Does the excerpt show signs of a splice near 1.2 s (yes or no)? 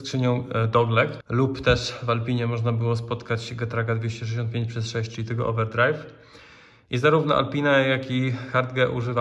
yes